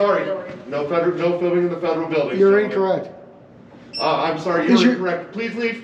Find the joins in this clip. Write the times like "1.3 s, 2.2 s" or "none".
none